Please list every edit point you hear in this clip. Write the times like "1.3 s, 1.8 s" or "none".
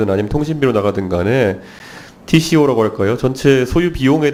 none